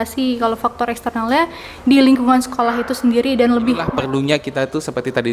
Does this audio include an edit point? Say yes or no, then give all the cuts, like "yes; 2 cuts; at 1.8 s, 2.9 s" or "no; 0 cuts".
yes; 1 cut; at 3.9 s